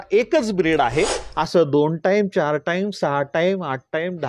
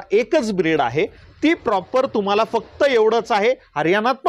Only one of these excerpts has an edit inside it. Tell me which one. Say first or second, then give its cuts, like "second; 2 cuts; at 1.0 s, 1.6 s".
first; 1 cut; at 1.2 s